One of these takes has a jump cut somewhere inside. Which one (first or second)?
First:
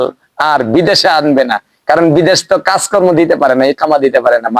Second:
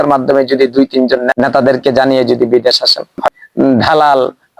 second